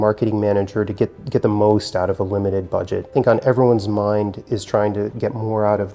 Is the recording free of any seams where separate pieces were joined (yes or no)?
no